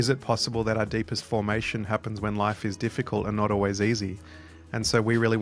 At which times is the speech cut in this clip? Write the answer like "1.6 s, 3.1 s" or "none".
none